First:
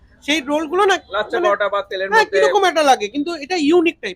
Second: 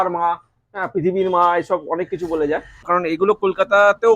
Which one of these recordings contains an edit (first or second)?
second